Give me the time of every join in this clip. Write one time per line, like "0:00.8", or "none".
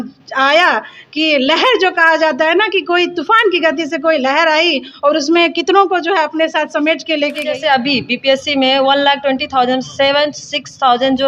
0:07.6